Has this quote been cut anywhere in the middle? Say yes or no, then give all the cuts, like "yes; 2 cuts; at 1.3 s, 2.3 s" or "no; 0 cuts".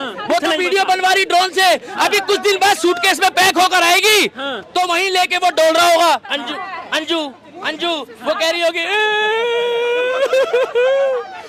no; 0 cuts